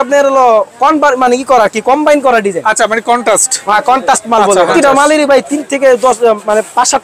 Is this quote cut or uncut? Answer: cut